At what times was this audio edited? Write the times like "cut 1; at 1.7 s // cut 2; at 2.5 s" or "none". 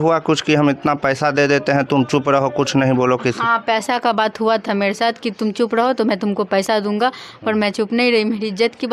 none